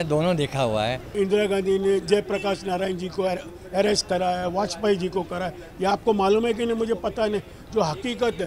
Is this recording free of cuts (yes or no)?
no